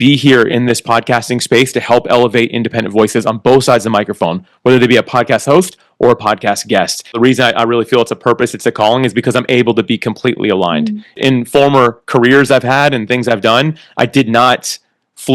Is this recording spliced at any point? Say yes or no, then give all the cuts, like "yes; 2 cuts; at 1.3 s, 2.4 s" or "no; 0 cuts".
yes; 2 cuts; at 7.1 s, 11.2 s